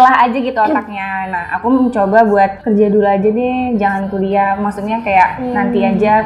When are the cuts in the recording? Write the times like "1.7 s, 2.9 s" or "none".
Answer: none